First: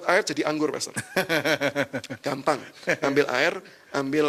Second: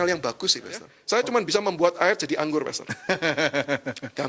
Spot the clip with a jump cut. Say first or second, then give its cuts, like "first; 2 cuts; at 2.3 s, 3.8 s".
second; 1 cut; at 0.9 s